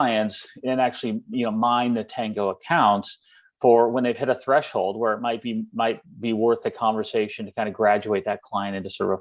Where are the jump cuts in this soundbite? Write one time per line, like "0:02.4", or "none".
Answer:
none